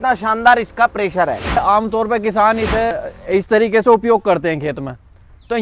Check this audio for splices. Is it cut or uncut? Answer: cut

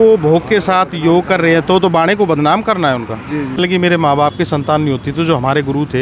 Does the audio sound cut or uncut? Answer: cut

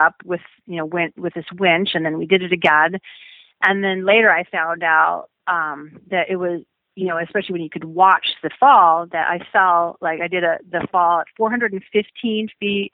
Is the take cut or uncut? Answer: uncut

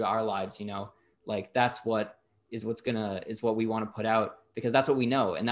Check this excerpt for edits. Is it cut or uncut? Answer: uncut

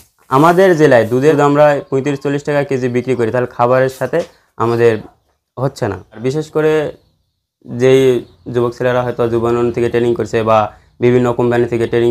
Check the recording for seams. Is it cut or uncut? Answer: cut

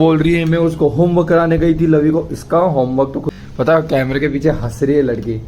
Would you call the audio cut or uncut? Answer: cut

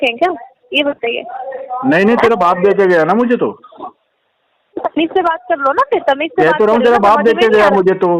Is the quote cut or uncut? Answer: uncut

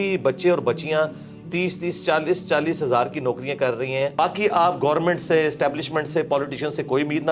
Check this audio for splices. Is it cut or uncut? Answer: cut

